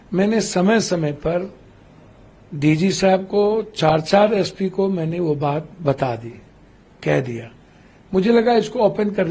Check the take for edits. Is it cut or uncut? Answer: uncut